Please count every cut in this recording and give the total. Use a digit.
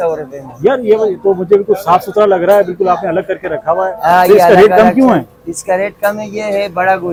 0